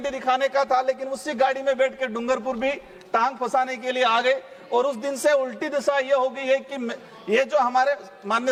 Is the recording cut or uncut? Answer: uncut